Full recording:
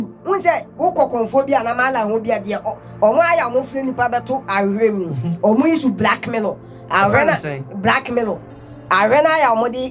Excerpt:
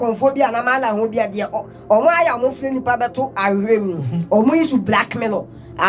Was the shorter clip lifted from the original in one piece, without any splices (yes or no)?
yes